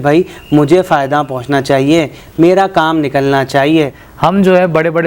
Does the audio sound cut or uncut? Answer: cut